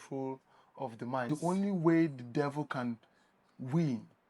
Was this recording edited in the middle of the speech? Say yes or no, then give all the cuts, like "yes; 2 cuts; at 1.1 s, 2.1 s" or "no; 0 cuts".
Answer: yes; 1 cut; at 1.3 s